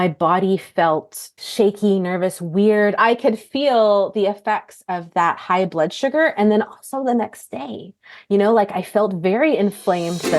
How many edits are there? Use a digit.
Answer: 2